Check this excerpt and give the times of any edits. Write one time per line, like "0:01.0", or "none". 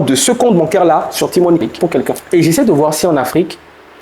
0:02.2